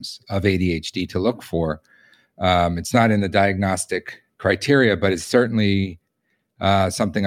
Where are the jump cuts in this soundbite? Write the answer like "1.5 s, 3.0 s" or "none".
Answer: none

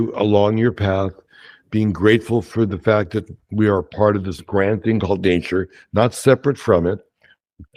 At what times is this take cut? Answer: none

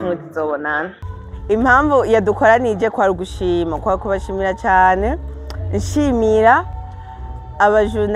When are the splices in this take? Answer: 1.0 s

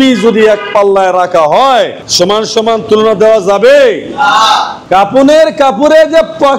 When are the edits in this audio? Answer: 4.8 s

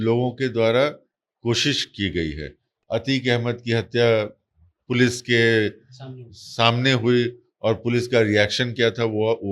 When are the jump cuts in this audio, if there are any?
2.7 s

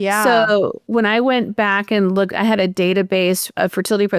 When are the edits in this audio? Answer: none

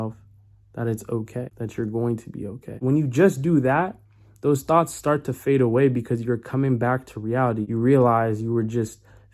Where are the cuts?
1.5 s, 2.8 s, 7.7 s

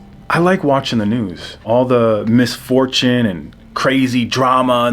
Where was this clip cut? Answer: 1.6 s

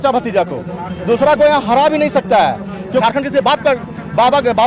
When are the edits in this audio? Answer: 3.0 s

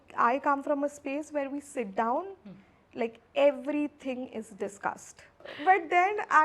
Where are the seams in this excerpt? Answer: 5.5 s

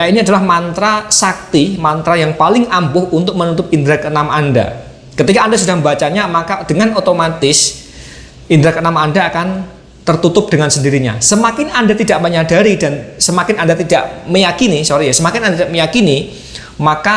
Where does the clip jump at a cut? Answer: none

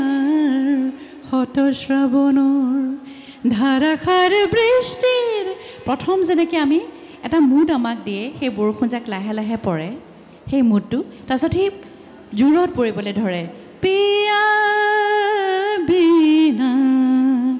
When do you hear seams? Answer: none

